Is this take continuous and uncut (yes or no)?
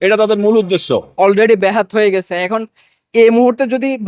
no